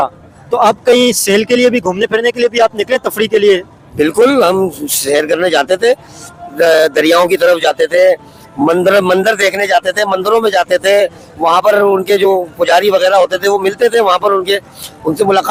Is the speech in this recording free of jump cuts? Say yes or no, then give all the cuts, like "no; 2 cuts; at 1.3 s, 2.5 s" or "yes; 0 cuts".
yes; 0 cuts